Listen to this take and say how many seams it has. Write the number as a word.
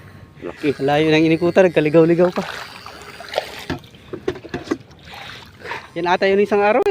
one